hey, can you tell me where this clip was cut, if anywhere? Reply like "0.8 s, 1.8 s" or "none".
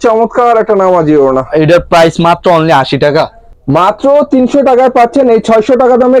3.4 s